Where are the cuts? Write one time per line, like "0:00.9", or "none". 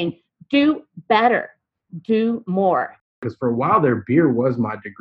0:03.1